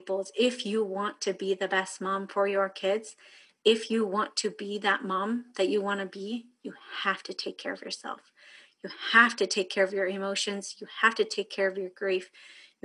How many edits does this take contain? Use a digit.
0